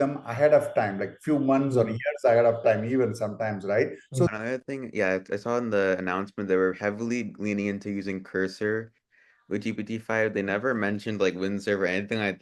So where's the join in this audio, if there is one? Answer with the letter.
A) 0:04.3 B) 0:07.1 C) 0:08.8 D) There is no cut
A